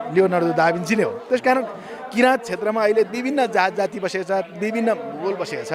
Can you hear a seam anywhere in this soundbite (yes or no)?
no